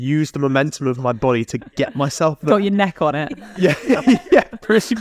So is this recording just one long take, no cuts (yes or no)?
yes